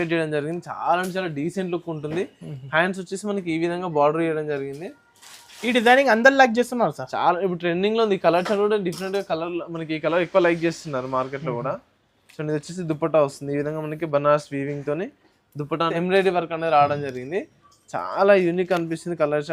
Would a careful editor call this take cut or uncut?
cut